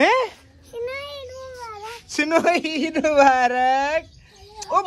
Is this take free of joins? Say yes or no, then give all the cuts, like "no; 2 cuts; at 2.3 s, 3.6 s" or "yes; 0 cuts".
yes; 0 cuts